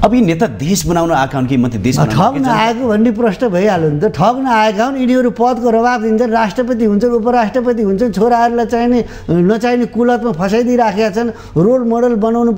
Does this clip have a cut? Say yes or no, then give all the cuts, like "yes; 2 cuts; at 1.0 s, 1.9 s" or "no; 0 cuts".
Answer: no; 0 cuts